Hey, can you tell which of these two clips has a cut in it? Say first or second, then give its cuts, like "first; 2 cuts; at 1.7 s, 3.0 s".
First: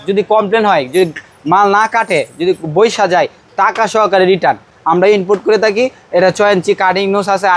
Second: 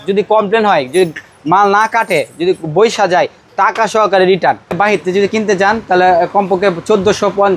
second; 1 cut; at 4.7 s